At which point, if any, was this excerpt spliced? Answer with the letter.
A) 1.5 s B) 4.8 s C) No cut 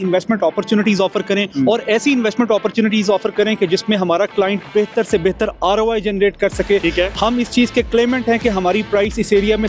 A